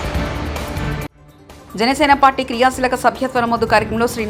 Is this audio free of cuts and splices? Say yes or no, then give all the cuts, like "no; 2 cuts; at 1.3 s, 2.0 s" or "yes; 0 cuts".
yes; 0 cuts